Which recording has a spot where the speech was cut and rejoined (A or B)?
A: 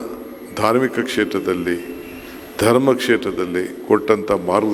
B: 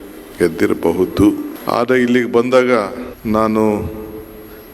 B